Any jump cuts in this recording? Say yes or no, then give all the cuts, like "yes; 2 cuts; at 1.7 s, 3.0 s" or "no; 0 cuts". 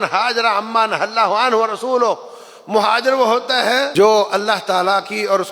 yes; 1 cut; at 3.9 s